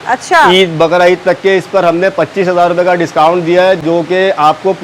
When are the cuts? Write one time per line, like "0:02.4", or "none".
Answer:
none